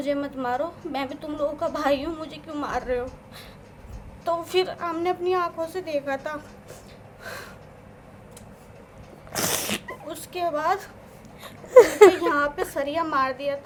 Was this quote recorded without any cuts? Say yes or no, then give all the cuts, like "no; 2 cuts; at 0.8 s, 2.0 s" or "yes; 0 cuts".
yes; 0 cuts